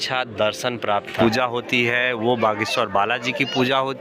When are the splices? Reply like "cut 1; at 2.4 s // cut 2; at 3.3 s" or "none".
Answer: cut 1; at 1.1 s